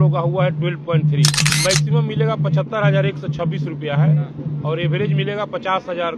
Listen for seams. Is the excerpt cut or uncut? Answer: cut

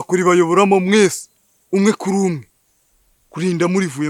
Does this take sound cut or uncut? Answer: uncut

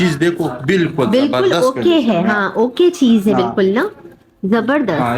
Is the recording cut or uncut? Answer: uncut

